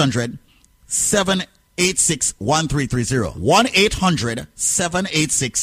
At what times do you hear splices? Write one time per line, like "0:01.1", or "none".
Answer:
0:03.4